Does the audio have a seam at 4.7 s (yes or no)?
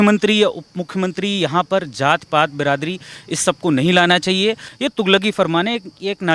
yes